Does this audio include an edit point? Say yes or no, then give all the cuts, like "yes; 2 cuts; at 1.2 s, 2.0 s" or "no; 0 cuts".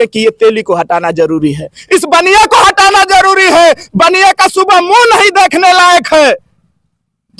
no; 0 cuts